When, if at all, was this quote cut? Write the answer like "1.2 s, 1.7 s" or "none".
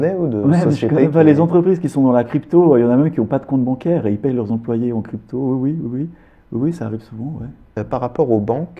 7.7 s